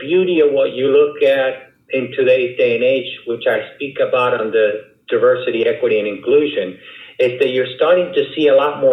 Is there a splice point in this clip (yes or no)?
no